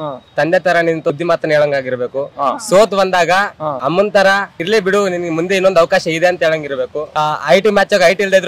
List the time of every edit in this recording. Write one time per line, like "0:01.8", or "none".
0:01.1
0:07.1